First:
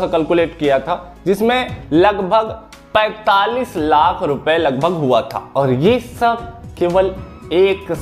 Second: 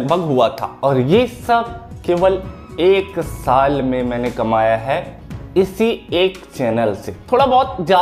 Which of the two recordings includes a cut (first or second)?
second